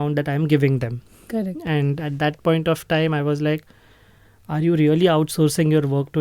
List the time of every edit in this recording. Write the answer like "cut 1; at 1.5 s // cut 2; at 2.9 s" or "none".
none